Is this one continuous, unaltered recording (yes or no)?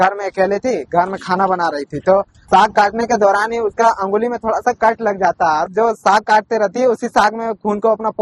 no